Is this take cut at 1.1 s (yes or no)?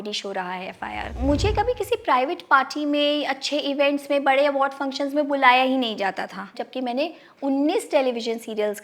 yes